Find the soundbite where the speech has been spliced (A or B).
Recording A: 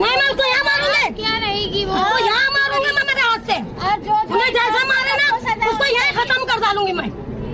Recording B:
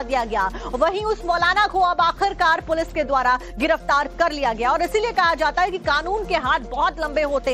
B